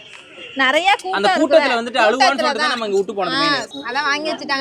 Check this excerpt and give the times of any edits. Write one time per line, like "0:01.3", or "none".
0:03.7